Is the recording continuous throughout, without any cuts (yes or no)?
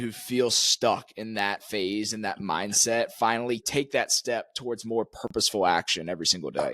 no